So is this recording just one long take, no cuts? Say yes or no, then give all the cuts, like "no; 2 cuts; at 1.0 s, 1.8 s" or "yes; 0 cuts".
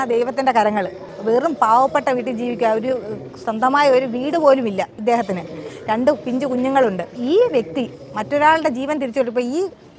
yes; 0 cuts